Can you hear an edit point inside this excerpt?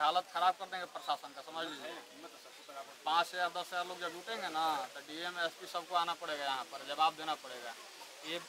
no; 0 cuts

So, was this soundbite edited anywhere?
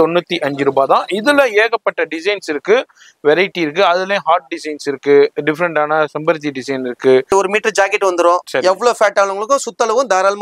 yes; 1 cut; at 7.3 s

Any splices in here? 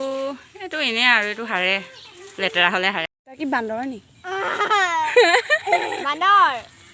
yes; 1 cut; at 3.1 s

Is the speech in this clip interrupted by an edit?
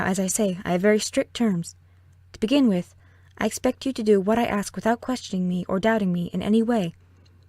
yes; 1 cut; at 3.5 s

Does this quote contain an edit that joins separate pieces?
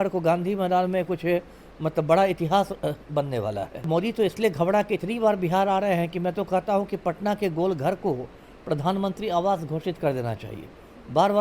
yes; 1 cut; at 3.9 s

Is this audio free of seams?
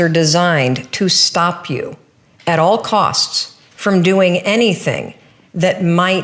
yes; 0 cuts

